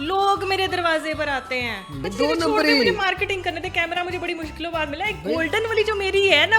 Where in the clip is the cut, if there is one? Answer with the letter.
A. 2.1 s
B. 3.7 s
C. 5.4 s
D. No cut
A